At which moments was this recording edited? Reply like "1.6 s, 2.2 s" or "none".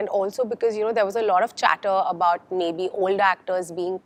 none